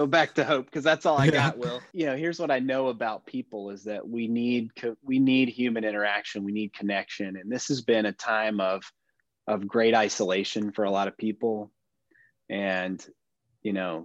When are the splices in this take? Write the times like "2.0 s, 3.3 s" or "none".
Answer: 1.8 s